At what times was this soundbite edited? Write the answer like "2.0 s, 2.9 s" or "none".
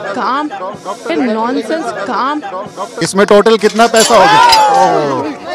1.0 s, 2.9 s